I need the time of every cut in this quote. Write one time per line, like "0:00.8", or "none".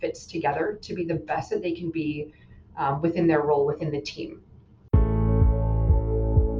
0:04.8